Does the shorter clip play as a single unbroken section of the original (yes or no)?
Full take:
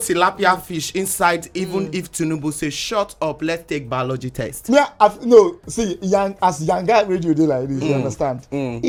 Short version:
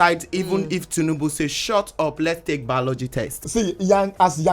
no